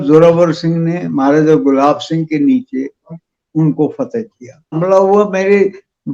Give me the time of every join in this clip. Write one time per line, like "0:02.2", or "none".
0:04.8